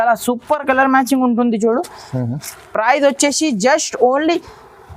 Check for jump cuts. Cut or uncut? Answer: uncut